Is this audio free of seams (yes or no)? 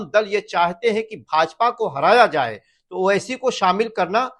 yes